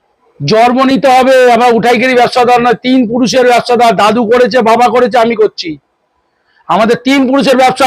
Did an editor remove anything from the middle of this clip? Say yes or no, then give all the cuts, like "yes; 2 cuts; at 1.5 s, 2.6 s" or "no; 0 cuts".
no; 0 cuts